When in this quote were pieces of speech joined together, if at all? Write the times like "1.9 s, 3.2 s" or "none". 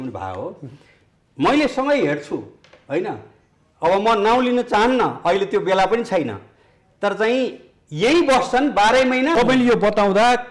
9.3 s